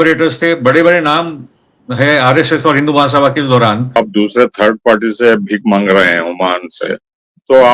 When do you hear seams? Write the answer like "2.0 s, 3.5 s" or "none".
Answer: 4.0 s